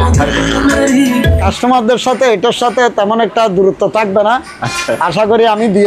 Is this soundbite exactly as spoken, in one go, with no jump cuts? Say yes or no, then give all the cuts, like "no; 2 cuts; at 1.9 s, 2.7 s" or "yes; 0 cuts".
no; 1 cut; at 1.4 s